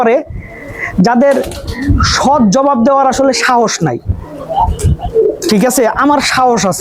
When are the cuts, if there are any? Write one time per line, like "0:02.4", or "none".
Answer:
none